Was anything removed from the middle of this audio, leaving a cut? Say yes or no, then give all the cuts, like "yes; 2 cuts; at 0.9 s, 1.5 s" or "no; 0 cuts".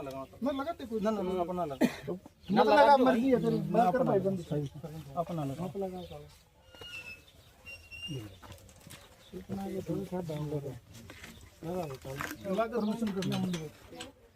yes; 1 cut; at 12.5 s